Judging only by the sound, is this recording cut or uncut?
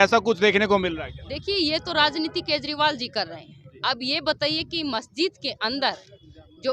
uncut